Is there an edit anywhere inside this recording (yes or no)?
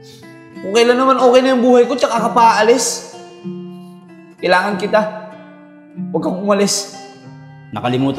yes